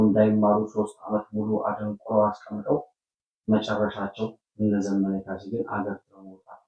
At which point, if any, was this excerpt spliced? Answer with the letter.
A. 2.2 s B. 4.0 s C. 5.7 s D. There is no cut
D